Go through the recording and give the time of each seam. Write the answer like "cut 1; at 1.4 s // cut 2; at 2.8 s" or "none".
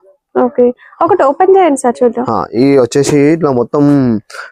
none